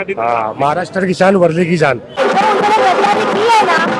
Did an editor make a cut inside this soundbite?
yes; 1 cut; at 2.2 s

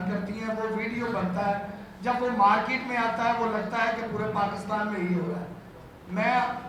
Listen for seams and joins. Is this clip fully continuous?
yes; 0 cuts

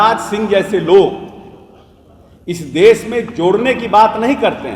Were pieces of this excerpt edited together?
no; 0 cuts

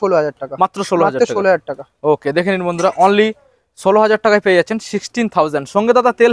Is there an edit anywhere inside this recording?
no; 0 cuts

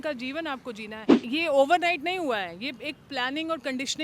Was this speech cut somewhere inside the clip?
yes; 1 cut; at 1.1 s

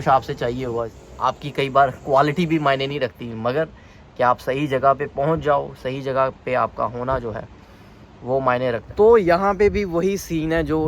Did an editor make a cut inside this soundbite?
yes; 2 cuts; at 1.0 s, 8.8 s

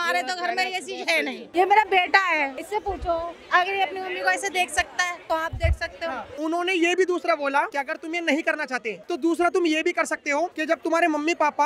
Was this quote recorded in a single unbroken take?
no; 7 cuts; at 1.4 s, 2.6 s, 5.2 s, 6.3 s, 7.7 s, 8.9 s, 10.6 s

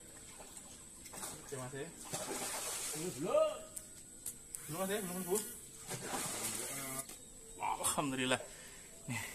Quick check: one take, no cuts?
no; 1 cut; at 7.0 s

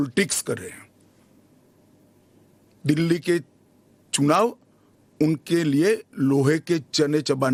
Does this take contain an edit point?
no; 0 cuts

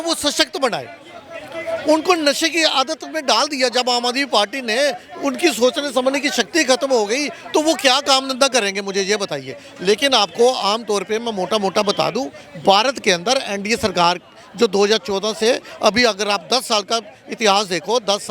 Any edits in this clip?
no; 0 cuts

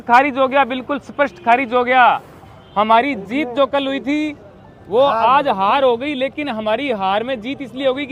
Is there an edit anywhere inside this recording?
no; 0 cuts

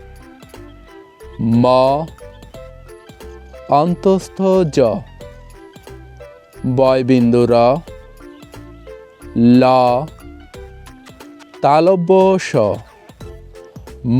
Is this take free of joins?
no; 2 cuts; at 2.1 s, 3.5 s

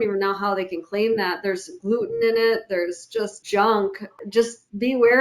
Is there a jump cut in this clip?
yes; 2 cuts; at 3.4 s, 4.1 s

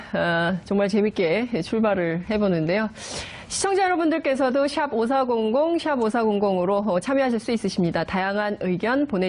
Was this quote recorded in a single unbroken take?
no; 1 cut; at 1.8 s

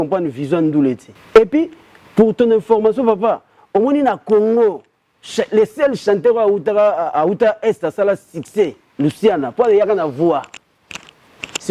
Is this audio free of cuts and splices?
no; 1 cut; at 1.1 s

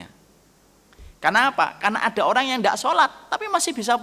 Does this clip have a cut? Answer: no; 0 cuts

